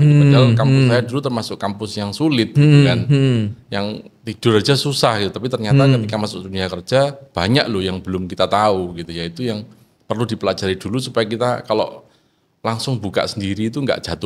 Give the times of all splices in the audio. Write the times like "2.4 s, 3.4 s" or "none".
none